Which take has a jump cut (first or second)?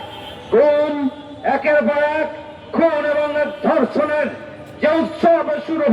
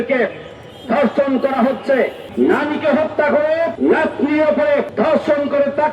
second